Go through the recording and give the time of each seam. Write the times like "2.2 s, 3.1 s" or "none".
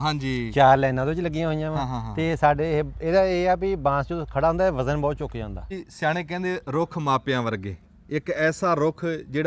5.7 s

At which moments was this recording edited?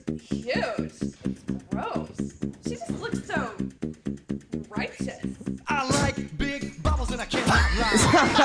none

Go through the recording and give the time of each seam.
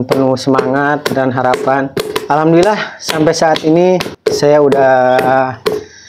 2.2 s, 4.1 s

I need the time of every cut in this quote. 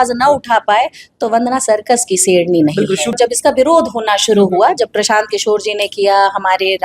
3.2 s

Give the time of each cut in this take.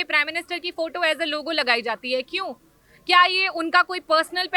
none

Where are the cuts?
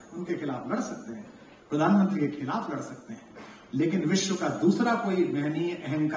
none

